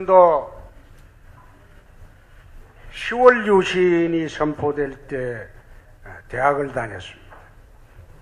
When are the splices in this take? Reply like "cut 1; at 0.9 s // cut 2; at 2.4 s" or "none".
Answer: cut 1; at 2.4 s